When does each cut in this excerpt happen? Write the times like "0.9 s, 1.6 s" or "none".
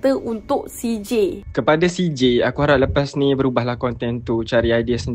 none